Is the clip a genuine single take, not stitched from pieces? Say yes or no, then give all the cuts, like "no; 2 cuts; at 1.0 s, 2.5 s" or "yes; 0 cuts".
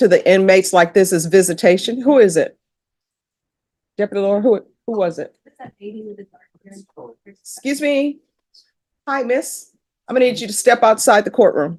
yes; 0 cuts